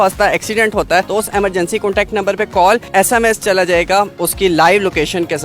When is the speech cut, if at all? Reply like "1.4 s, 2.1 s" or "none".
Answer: 1.1 s, 2.9 s, 4.1 s